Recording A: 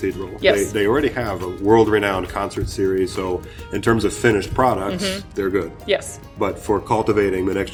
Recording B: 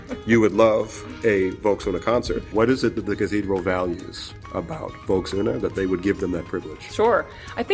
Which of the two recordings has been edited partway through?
B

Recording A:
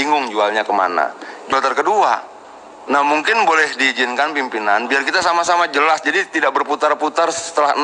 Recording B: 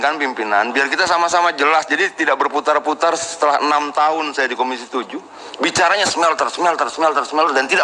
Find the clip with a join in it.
A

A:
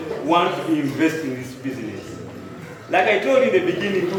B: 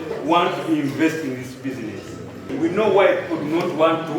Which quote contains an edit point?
B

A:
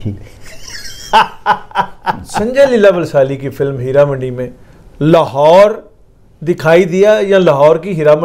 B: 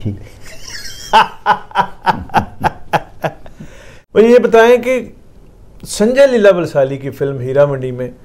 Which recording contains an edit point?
A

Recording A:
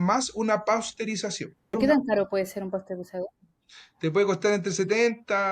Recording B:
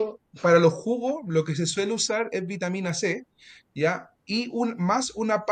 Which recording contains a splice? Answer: A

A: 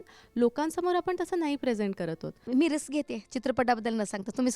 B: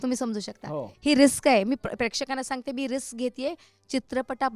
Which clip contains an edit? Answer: A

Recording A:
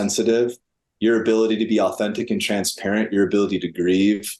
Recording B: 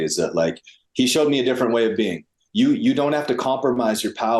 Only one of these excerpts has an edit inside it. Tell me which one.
B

